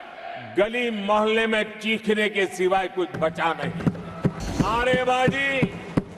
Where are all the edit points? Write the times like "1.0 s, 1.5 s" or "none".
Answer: 4.4 s